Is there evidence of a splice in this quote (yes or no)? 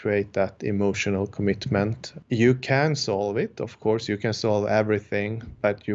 yes